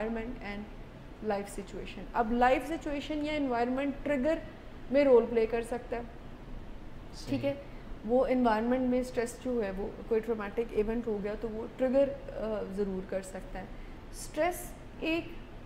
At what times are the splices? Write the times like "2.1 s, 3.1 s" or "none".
none